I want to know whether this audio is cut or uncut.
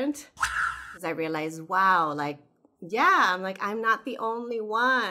cut